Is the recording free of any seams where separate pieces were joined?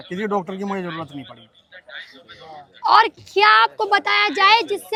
yes; 0 cuts

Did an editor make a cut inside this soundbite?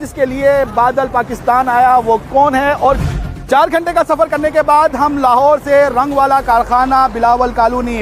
yes; 1 cut; at 3.0 s

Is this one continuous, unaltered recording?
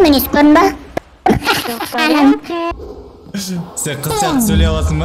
no; 1 cut; at 2.7 s

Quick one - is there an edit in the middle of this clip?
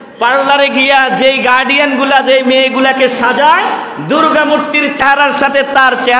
yes; 1 cut; at 5.0 s

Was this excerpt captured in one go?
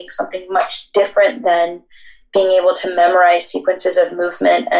yes; 0 cuts

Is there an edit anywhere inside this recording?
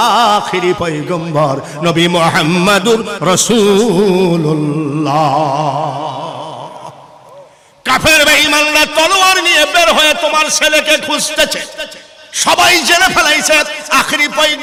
no; 0 cuts

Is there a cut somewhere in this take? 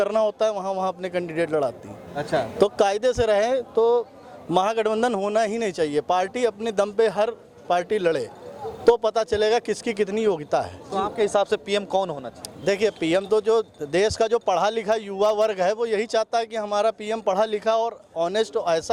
no; 0 cuts

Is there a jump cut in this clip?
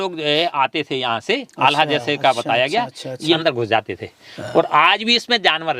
yes; 1 cut; at 3.4 s

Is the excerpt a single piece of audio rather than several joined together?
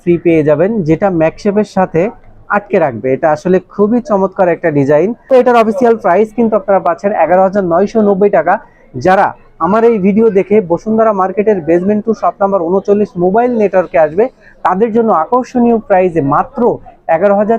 no; 1 cut; at 5.2 s

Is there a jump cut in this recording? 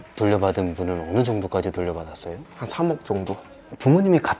yes; 1 cut; at 3.4 s

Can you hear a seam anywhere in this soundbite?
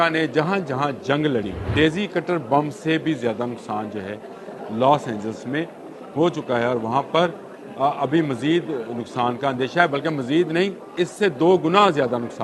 yes; 2 cuts; at 1.6 s, 10.9 s

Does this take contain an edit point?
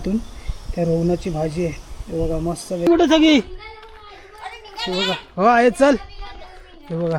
yes; 1 cut; at 2.9 s

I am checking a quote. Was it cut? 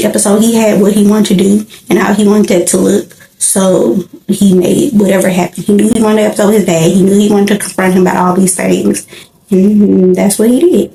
no; 0 cuts

